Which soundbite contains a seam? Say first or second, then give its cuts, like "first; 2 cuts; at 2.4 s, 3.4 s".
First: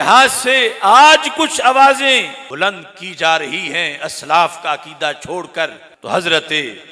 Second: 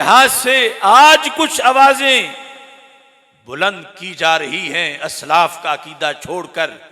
first; 2 cuts; at 2.4 s, 5.9 s